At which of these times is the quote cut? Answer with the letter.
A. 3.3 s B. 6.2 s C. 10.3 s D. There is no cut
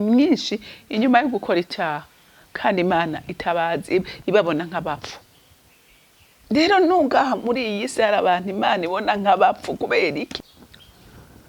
C